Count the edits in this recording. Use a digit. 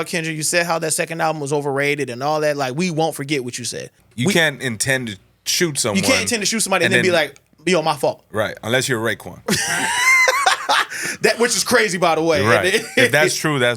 2